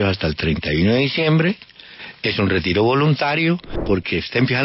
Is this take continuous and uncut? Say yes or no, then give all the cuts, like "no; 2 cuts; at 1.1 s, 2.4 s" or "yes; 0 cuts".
no; 1 cut; at 3.7 s